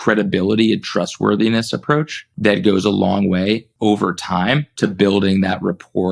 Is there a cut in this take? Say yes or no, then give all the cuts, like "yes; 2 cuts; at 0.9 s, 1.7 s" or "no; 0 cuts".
yes; 3 cuts; at 2.2 s, 3.7 s, 4.7 s